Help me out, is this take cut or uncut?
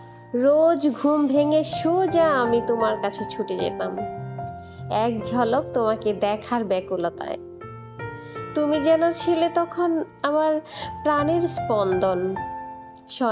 uncut